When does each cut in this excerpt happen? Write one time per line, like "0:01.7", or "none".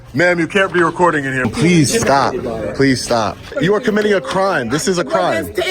0:01.5
0:03.5